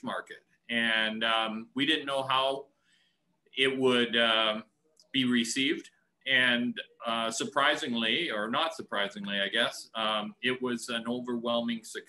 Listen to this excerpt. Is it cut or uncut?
uncut